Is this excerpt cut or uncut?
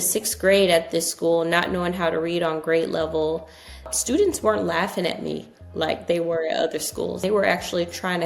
cut